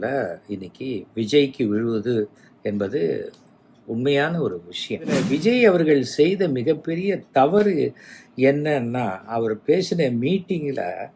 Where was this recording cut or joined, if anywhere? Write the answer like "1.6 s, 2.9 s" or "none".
5.2 s